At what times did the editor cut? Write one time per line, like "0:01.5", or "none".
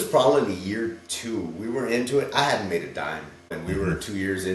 none

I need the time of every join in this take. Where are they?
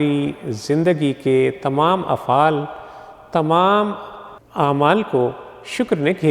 0:04.4

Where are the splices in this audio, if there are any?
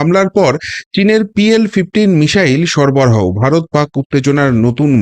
none

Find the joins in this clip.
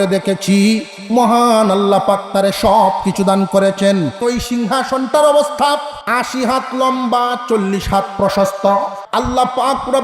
0:04.2
0:09.0

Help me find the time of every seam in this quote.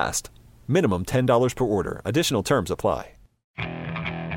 0:03.4

